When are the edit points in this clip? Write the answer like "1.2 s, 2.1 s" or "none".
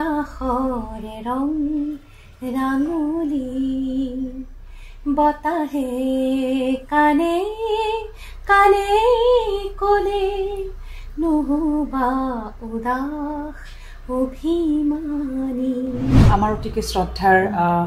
16.2 s